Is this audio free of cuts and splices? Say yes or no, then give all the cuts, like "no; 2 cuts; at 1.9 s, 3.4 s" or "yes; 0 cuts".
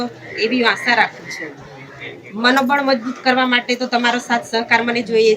yes; 0 cuts